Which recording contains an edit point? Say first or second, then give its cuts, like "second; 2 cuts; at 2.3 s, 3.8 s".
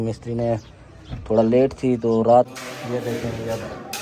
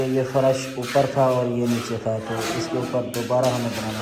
first; 1 cut; at 2.5 s